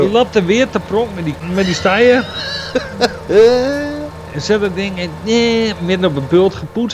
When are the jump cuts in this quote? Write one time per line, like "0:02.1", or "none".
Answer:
0:01.4